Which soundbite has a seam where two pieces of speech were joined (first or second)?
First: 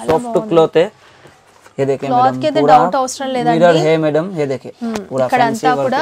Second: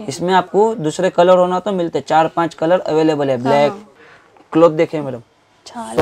second